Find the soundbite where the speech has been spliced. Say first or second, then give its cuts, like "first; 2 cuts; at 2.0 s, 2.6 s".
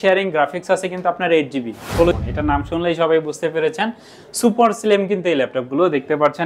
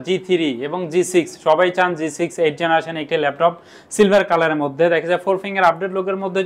first; 1 cut; at 2.1 s